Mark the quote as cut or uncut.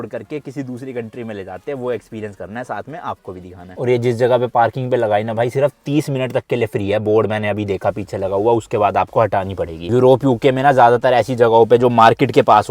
uncut